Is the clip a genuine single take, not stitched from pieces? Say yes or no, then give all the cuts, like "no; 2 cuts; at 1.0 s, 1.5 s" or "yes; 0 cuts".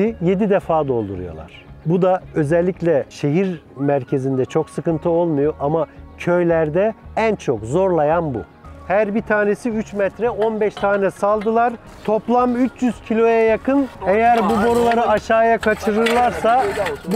no; 4 cuts; at 3.1 s, 7.0 s, 8.6 s, 13.9 s